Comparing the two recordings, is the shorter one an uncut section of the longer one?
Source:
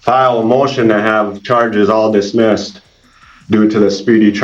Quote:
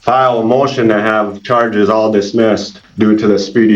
no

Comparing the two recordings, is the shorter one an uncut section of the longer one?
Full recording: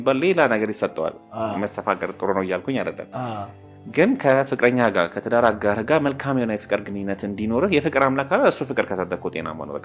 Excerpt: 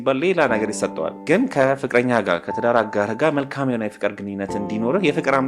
no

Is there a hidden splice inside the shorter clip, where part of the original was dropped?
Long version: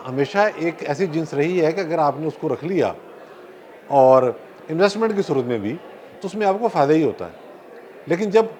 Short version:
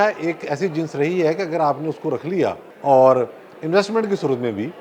yes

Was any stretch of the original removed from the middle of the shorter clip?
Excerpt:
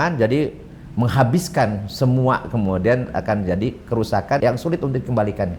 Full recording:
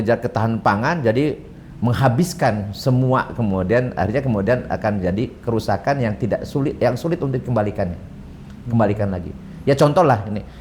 yes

